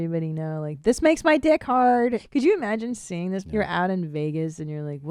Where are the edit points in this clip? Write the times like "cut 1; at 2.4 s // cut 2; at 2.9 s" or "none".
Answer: cut 1; at 2.2 s // cut 2; at 3.4 s